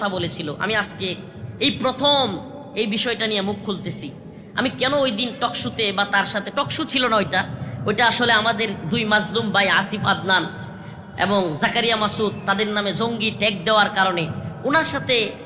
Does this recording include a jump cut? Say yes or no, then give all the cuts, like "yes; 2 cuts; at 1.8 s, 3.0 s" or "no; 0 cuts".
no; 0 cuts